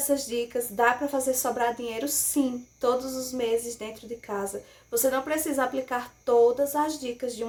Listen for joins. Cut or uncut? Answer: uncut